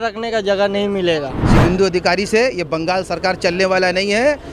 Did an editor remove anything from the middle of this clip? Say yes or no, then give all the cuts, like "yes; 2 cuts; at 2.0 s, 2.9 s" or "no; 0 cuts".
yes; 1 cut; at 1.4 s